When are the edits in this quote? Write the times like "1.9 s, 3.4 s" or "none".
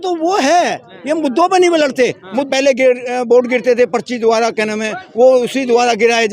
2.5 s